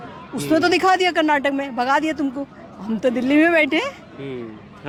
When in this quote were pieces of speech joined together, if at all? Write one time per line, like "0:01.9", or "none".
none